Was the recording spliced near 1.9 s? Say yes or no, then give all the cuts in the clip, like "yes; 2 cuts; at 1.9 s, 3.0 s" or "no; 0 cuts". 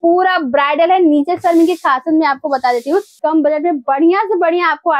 no; 1 cut; at 3.1 s